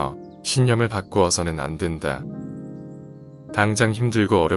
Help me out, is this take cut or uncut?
uncut